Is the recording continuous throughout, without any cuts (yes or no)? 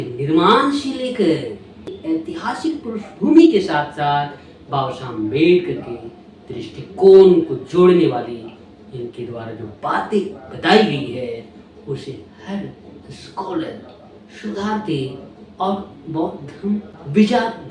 yes